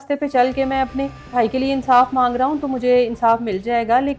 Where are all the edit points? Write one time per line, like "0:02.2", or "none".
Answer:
0:01.3